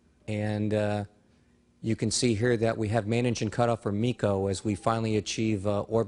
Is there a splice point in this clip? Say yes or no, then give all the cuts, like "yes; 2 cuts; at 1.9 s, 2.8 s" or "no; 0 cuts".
yes; 1 cut; at 5.1 s